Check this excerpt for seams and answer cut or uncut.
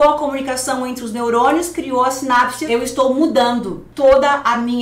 cut